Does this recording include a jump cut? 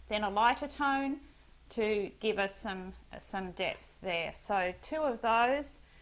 yes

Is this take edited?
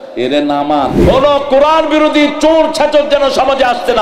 yes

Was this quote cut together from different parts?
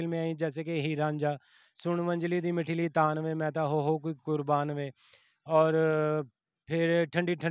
no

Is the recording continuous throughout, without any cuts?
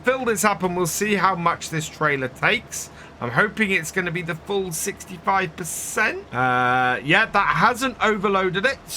no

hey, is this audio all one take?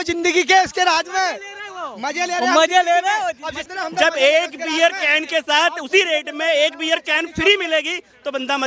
no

